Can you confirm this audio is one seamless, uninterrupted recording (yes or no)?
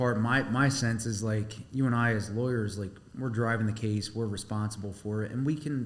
yes